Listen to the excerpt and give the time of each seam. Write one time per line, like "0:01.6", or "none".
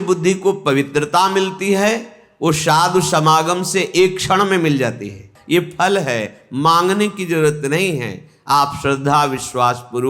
0:05.3